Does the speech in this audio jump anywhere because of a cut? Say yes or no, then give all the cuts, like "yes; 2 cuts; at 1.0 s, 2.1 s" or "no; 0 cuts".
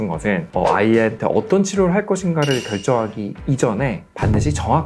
no; 0 cuts